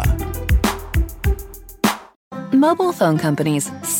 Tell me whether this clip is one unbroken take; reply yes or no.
no